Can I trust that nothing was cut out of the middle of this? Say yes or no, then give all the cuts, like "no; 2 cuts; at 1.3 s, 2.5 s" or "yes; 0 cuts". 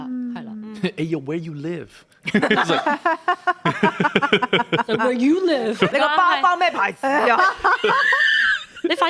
no; 1 cut; at 5.9 s